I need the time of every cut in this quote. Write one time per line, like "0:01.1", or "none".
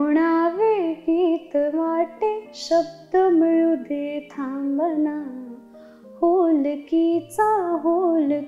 none